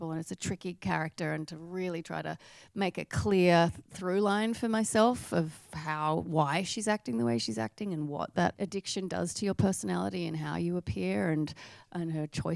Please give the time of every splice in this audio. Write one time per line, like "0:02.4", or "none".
0:08.6